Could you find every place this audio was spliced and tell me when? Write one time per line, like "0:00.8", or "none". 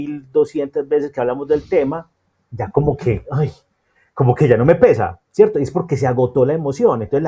none

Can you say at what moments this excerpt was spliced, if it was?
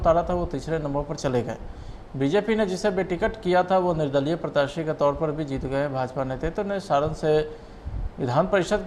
none

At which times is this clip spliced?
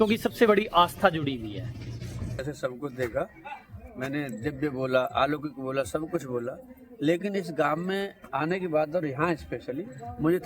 0:02.4

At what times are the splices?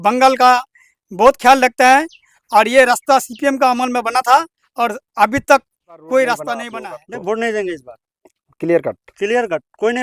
0:06.7

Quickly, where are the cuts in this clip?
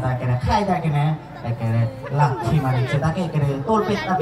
none

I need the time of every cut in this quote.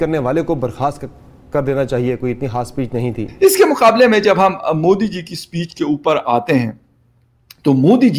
0:03.3

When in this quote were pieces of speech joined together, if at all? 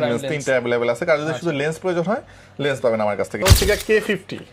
0:03.4

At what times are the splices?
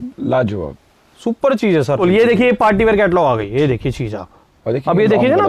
0:02.0

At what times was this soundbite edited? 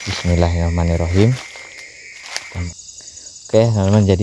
0:02.7

